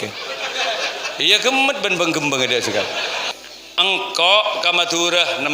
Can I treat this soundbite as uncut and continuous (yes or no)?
no